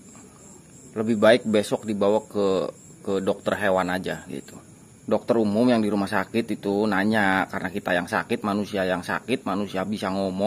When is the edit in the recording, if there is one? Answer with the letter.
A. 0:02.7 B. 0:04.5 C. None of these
B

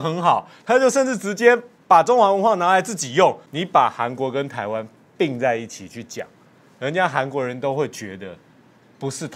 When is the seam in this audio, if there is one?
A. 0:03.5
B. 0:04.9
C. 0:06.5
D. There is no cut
A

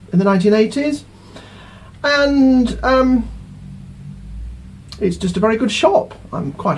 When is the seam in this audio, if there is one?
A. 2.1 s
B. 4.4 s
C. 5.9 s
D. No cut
B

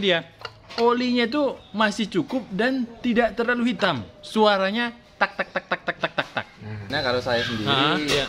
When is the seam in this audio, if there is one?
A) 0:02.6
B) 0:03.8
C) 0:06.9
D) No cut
C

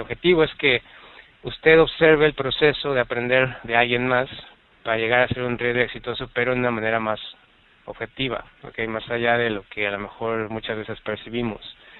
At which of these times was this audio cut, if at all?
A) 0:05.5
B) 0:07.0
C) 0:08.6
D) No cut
A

